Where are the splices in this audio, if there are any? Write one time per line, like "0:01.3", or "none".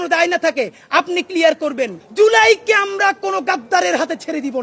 0:02.0